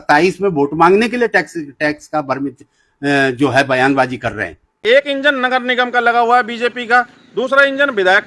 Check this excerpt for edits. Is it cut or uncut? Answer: cut